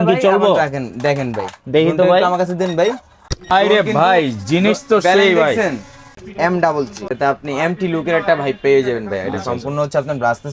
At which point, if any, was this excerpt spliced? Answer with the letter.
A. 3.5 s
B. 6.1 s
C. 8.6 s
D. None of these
B